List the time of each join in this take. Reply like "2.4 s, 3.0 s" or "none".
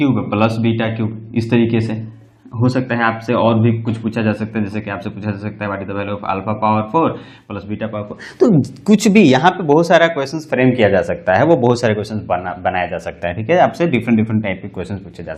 none